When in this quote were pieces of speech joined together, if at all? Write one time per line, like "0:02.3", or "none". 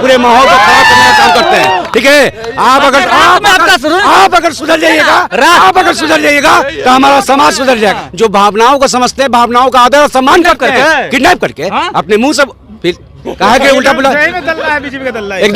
0:08.0